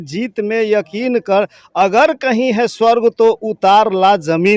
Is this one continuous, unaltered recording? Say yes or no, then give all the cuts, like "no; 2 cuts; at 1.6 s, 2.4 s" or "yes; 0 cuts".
yes; 0 cuts